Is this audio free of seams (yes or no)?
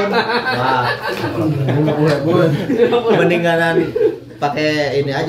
yes